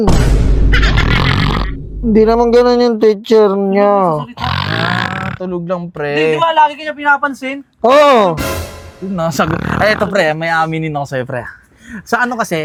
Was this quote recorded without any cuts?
yes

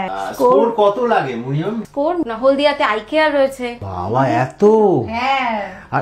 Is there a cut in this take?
yes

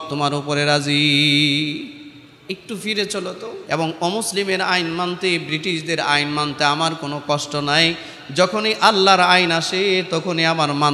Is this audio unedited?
no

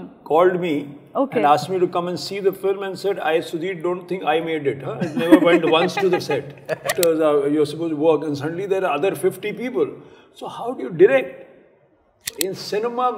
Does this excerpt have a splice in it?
yes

